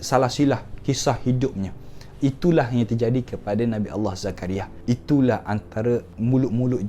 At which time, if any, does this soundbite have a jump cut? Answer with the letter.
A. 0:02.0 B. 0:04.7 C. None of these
B